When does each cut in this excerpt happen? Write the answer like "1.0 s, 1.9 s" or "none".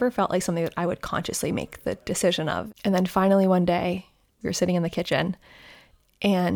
2.6 s, 4.3 s